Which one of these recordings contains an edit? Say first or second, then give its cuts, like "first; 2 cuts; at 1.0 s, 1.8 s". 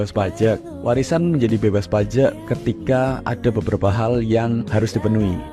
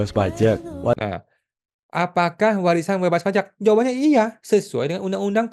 first; 1 cut; at 1.0 s